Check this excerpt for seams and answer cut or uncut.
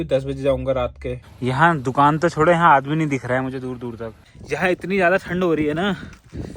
cut